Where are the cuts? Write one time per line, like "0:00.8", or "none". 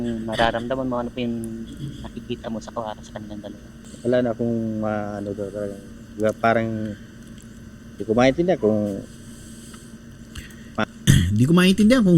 0:03.8